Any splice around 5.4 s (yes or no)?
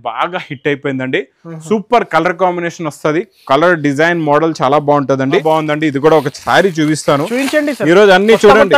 yes